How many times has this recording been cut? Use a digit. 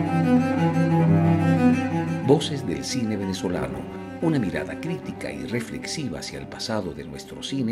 0